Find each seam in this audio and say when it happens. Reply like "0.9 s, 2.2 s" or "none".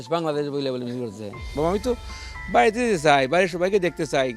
1.4 s